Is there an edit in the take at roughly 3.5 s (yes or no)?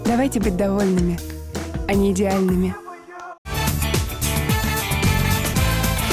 yes